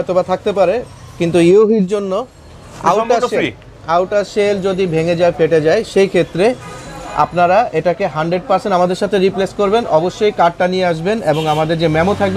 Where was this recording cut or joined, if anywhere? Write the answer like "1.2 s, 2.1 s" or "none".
none